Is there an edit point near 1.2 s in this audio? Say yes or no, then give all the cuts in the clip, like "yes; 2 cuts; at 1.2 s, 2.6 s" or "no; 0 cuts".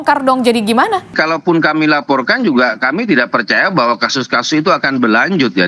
yes; 1 cut; at 1.2 s